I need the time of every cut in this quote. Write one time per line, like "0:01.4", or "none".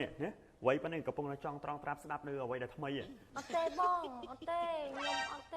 0:03.2